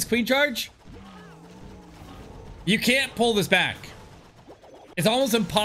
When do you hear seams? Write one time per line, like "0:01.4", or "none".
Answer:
none